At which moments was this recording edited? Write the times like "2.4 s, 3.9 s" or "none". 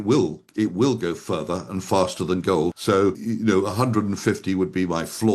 3.0 s